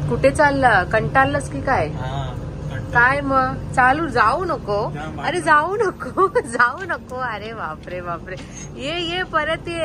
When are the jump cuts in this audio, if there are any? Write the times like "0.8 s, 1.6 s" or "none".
none